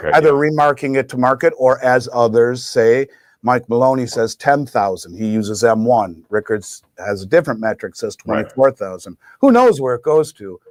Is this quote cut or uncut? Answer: uncut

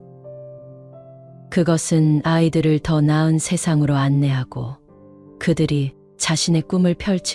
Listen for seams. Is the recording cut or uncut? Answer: uncut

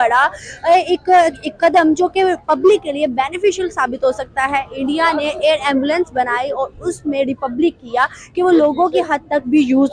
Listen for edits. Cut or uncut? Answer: uncut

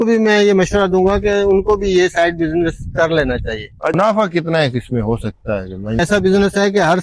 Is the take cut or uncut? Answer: cut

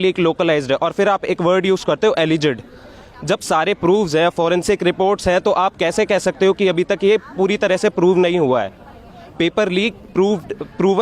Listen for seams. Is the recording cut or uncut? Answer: uncut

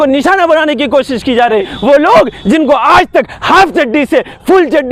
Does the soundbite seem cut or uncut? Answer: cut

